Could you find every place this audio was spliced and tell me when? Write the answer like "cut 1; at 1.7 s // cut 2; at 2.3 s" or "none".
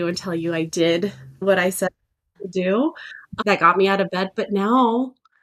cut 1; at 1.4 s